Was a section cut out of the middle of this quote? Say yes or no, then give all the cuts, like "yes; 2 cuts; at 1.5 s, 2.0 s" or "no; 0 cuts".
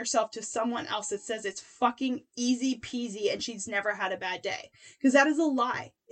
no; 0 cuts